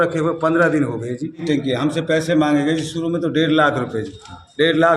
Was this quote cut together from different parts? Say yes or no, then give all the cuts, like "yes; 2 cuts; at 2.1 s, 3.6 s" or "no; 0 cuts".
yes; 1 cut; at 1.4 s